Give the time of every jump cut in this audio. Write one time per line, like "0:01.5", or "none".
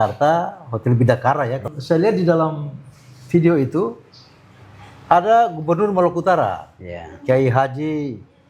0:01.7